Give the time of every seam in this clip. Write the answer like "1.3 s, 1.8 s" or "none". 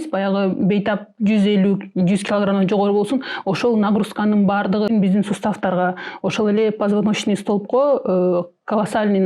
4.9 s